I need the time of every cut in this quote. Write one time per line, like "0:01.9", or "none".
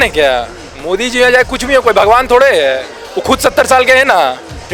none